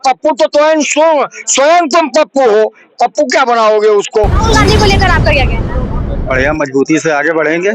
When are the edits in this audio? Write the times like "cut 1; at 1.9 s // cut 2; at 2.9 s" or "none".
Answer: cut 1; at 4.4 s